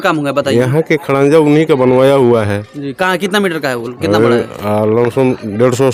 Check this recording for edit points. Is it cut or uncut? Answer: uncut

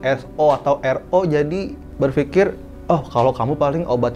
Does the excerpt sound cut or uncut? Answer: uncut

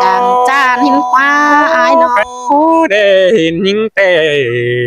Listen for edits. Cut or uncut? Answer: cut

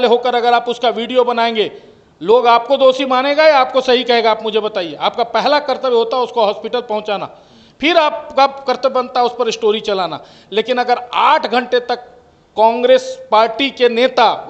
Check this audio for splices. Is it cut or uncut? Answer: uncut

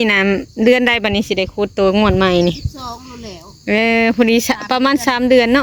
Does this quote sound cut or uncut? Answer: uncut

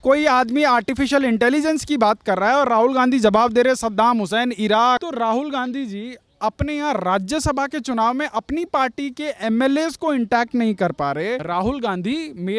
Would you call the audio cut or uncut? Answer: cut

